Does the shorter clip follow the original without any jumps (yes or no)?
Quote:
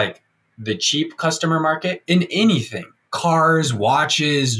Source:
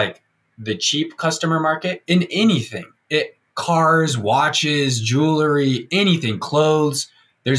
no